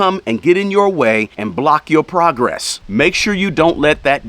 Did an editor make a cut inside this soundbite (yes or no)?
yes